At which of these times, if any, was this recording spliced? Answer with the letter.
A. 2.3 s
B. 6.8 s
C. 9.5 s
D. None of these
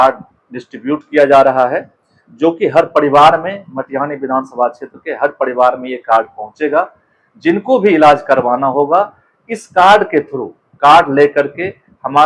D